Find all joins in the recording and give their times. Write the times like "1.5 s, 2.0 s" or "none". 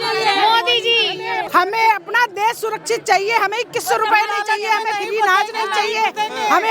1.5 s